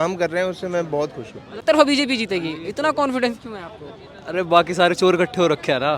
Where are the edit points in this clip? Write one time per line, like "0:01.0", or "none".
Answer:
0:01.5